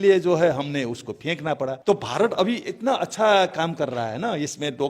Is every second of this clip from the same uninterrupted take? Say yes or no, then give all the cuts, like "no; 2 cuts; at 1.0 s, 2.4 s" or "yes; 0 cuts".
no; 1 cut; at 1.8 s